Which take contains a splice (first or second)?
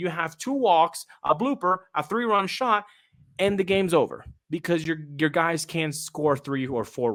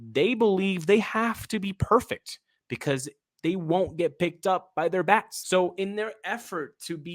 second